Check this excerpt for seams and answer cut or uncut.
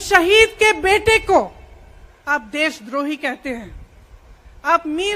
uncut